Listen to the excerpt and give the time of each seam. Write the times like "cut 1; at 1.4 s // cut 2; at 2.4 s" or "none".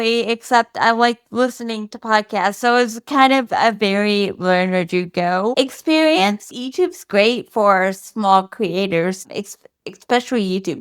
cut 1; at 6.5 s